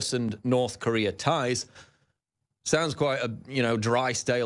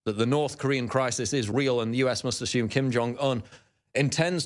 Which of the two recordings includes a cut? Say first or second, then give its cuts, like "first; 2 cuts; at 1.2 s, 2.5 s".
first; 1 cut; at 1.7 s